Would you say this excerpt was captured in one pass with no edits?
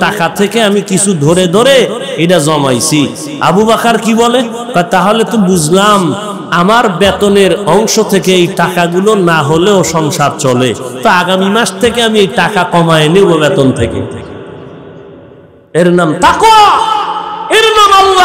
no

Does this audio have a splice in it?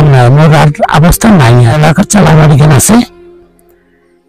yes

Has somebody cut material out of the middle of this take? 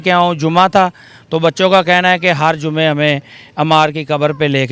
no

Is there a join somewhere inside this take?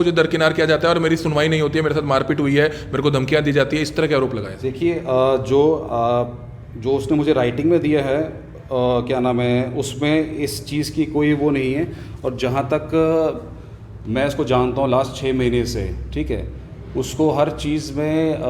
no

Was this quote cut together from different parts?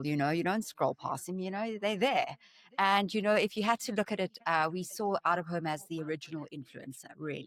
no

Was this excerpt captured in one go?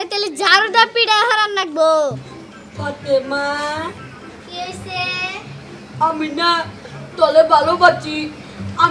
no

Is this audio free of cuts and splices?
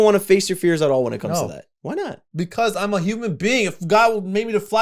yes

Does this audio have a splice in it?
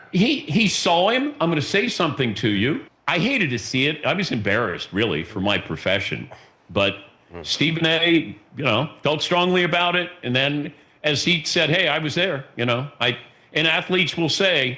yes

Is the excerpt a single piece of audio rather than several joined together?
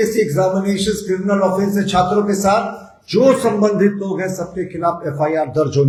yes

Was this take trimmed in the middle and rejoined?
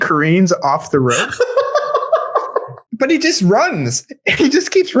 yes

